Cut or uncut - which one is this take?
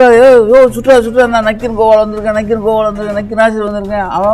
uncut